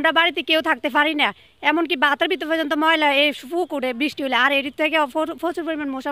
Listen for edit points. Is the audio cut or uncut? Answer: uncut